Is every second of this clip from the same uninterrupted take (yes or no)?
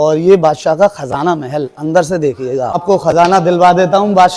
no